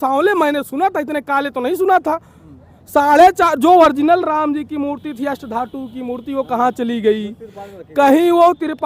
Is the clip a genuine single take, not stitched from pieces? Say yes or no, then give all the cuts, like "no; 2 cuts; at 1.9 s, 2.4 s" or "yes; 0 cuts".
yes; 0 cuts